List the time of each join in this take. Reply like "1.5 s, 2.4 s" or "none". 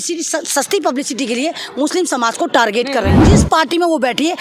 3.2 s